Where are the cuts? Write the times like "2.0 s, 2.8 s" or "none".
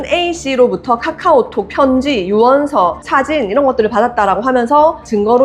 none